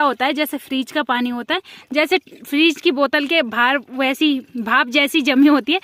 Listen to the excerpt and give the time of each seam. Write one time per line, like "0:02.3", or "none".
none